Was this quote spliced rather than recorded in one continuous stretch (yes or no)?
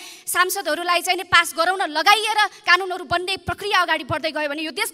no